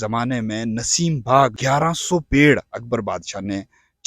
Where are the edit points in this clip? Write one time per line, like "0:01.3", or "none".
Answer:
0:01.6